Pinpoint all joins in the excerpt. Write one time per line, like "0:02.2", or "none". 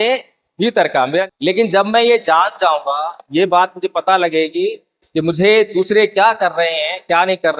0:01.3